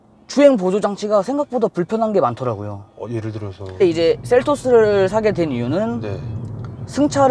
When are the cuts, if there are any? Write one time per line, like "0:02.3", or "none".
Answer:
0:03.8